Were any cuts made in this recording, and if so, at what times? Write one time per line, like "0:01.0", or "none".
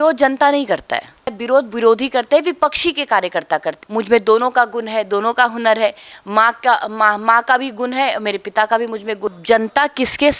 0:01.4
0:03.8
0:09.3